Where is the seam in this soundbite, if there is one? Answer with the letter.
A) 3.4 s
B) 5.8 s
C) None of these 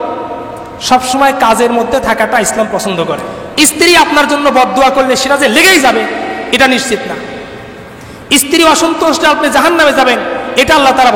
A